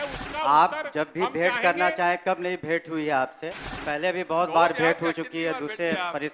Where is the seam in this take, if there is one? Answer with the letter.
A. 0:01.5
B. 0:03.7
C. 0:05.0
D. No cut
B